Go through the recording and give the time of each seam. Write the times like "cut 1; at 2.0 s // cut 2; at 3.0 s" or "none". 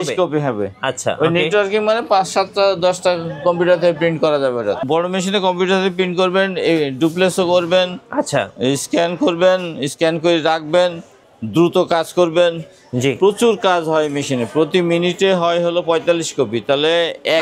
cut 1; at 4.8 s